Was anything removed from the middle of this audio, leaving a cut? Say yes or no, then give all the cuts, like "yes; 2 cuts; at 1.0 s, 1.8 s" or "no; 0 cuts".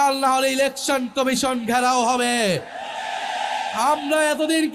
no; 0 cuts